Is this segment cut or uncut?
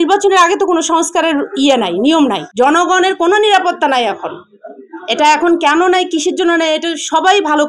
cut